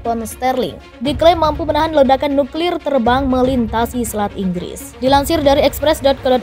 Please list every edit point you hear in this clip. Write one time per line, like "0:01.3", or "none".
0:01.0